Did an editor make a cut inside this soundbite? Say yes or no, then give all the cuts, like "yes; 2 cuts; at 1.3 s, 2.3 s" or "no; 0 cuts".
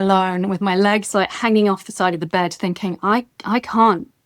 no; 0 cuts